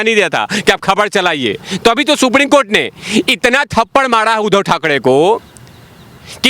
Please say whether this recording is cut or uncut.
cut